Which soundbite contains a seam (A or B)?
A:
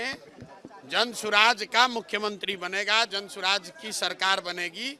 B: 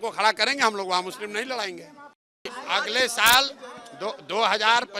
B